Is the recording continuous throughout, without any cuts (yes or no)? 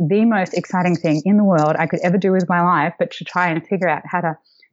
yes